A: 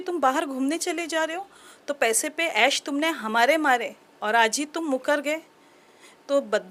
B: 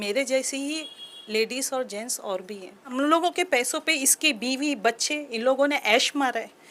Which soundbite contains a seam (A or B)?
B